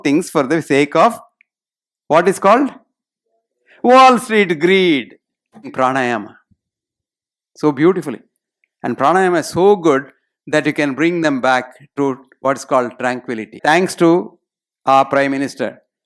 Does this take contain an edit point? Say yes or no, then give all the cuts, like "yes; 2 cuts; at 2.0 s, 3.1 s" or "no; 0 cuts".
yes; 2 cuts; at 5.7 s, 13.6 s